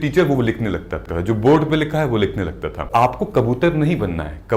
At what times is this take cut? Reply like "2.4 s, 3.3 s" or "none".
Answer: 1.0 s, 2.9 s